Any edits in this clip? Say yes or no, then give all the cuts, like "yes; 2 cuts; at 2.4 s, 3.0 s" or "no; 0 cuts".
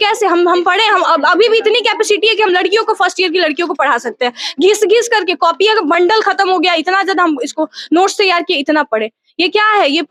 no; 0 cuts